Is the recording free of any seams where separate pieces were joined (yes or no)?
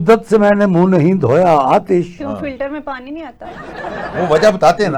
yes